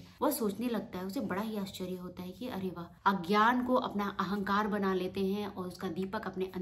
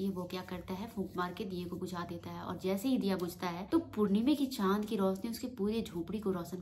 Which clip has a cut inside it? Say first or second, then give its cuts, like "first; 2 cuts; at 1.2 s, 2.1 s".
first; 1 cut; at 2.9 s